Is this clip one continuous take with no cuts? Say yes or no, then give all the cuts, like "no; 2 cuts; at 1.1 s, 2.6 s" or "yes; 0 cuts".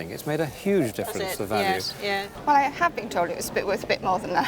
no; 1 cut; at 2.3 s